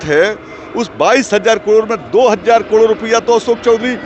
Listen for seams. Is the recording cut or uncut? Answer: uncut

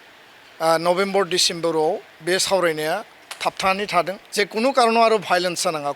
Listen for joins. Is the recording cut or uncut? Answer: cut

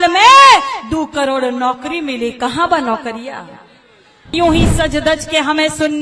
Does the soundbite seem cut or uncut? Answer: cut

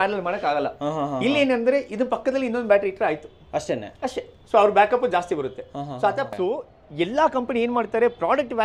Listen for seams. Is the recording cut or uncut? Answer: cut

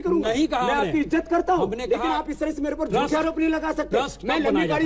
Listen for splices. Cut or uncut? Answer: uncut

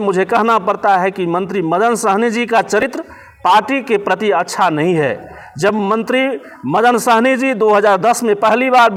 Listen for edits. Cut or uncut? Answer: uncut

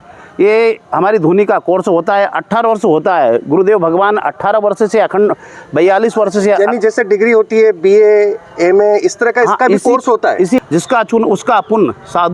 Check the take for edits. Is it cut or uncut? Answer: cut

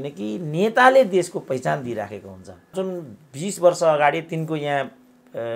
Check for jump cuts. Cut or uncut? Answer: cut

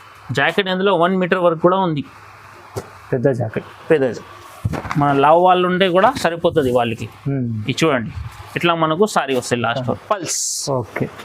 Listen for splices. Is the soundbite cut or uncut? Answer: cut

